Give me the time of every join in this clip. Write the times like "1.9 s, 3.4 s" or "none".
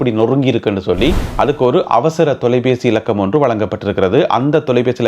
1.2 s